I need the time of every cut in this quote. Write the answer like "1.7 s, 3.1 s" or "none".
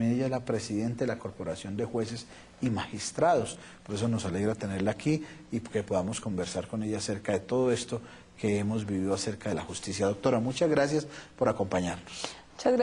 1.3 s